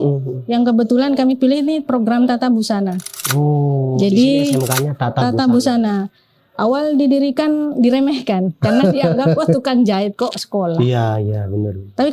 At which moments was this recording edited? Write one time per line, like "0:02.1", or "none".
none